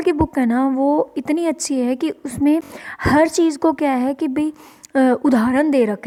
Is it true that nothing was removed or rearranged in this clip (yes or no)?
yes